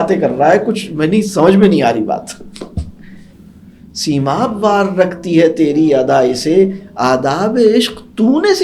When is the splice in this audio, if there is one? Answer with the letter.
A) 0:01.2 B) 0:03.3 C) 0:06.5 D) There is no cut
B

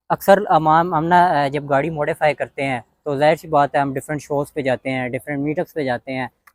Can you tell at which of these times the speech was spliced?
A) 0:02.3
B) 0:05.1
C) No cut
C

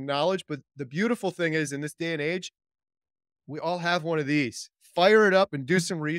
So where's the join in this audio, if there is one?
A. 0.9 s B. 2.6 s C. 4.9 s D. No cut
D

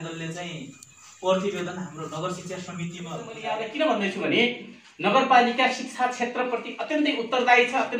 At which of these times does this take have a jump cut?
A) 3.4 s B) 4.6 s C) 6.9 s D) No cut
A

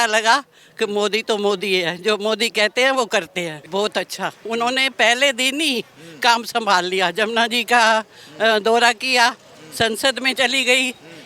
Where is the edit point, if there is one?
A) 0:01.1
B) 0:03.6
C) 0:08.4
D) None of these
B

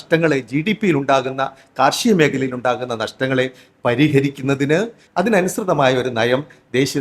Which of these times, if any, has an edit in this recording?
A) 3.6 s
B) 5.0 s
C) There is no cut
B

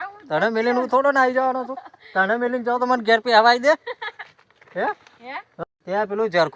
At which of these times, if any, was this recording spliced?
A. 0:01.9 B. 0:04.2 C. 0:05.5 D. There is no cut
C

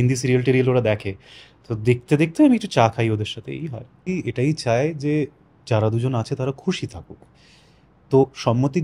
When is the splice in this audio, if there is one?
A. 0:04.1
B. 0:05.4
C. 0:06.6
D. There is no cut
A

